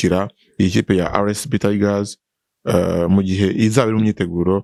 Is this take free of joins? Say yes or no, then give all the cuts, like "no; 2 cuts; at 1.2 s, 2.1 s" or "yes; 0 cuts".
yes; 0 cuts